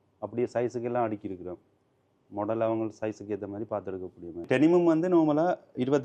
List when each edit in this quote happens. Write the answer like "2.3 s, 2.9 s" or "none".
4.4 s